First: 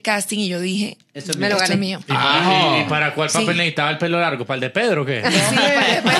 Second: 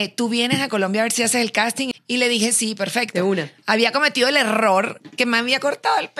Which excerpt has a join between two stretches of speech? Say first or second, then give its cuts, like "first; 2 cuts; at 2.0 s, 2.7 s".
second; 1 cut; at 1.9 s